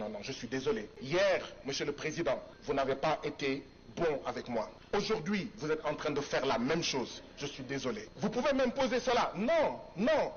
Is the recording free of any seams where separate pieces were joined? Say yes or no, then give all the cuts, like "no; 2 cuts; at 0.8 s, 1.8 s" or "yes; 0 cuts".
no; 4 cuts; at 0.9 s, 2.5 s, 4.8 s, 8.1 s